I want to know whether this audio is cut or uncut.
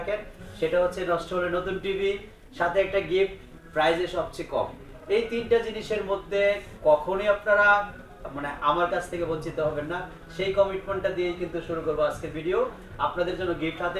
uncut